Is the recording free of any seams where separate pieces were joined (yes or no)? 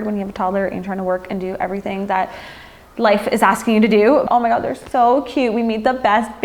no